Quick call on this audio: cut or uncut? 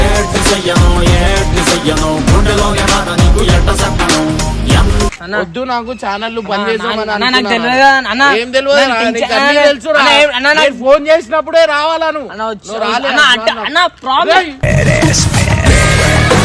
cut